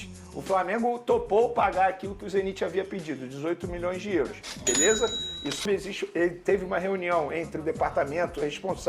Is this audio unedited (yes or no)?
no